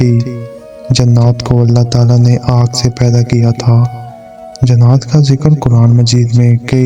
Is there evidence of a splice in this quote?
no; 0 cuts

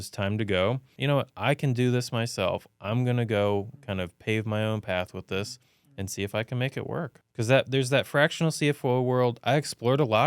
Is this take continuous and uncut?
no; 2 cuts; at 0.9 s, 7.2 s

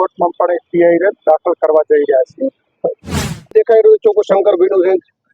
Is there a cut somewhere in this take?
yes; 1 cut; at 3.5 s

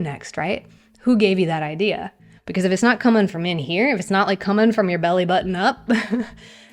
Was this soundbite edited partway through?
no; 0 cuts

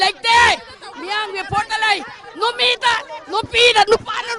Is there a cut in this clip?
no; 0 cuts

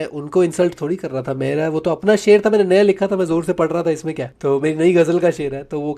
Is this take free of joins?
no; 1 cut; at 4.3 s

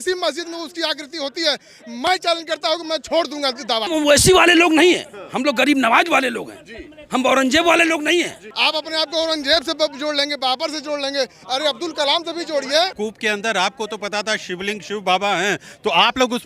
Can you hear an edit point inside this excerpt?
yes; 3 cuts; at 3.9 s, 8.4 s, 12.9 s

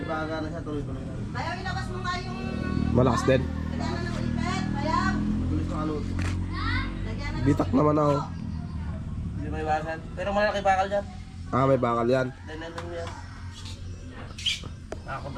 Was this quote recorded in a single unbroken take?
yes; 0 cuts

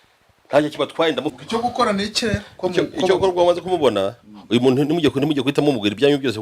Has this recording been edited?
yes; 1 cut; at 1.4 s

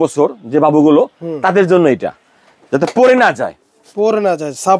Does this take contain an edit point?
no; 0 cuts

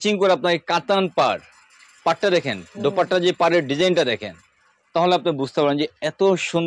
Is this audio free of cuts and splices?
yes; 0 cuts

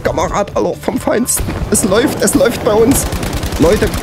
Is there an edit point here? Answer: no; 0 cuts

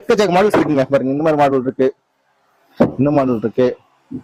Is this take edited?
no; 0 cuts

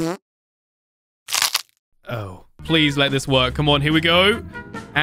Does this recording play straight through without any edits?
no; 1 cut; at 2.5 s

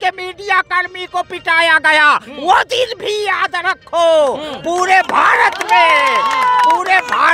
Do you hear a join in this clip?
no; 0 cuts

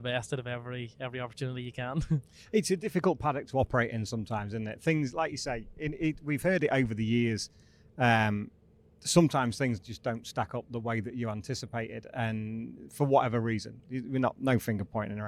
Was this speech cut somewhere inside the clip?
no; 0 cuts

